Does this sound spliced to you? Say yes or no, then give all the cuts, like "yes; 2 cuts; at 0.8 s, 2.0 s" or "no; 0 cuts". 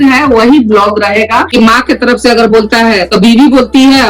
yes; 1 cut; at 1.5 s